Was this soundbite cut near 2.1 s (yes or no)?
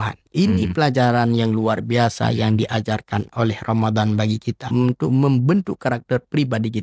no